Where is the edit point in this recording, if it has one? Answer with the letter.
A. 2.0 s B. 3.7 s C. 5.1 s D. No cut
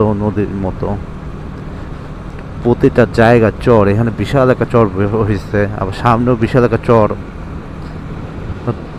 D